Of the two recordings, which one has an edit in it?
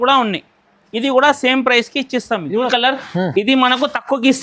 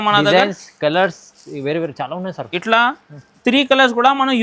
first; 1 cut; at 2.7 s

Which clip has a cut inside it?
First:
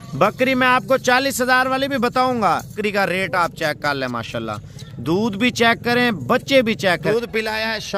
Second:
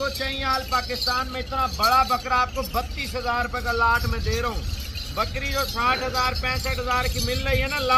first; 2 cuts; at 2.8 s, 7.0 s

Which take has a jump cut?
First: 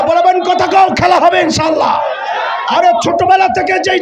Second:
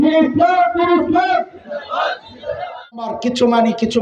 second; 1 cut; at 3.0 s

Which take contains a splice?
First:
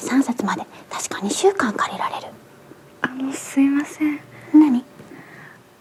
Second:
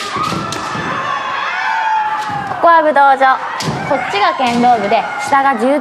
second; 1 cut; at 2.5 s

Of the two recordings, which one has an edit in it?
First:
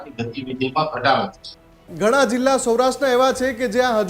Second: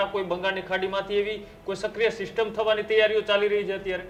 first; 1 cut; at 1.8 s

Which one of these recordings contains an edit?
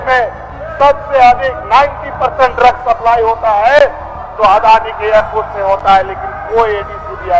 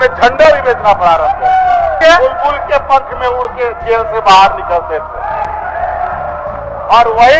second; 1 cut; at 2.0 s

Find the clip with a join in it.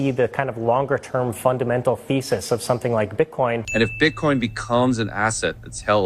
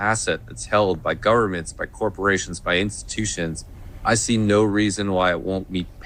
first; 1 cut; at 3.7 s

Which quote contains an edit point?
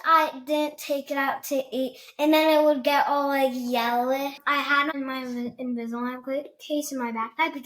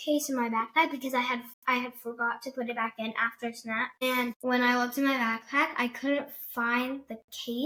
first; 1 cut; at 4.4 s

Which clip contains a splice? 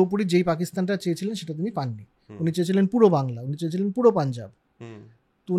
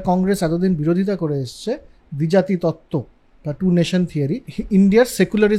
second; 1 cut; at 4.5 s

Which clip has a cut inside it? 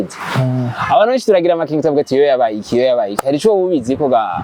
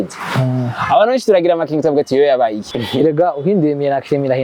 second; 1 cut; at 2.6 s

